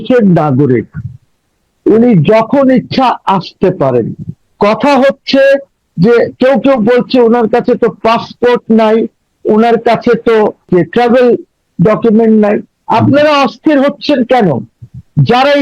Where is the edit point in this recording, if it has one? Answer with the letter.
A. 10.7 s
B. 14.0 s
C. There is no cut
A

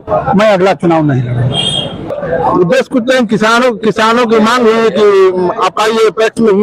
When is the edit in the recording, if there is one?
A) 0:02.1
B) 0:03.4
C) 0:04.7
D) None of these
A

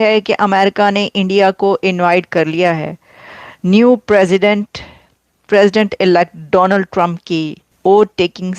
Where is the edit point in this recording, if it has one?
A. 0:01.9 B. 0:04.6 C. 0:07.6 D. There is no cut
C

